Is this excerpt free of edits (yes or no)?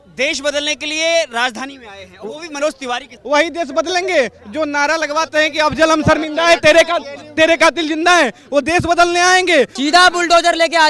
no